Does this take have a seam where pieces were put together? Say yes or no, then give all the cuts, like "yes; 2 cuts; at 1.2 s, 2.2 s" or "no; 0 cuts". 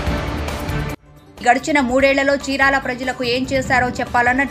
no; 0 cuts